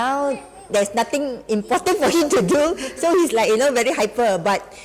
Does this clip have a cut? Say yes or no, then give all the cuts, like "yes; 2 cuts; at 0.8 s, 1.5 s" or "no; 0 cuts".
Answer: no; 0 cuts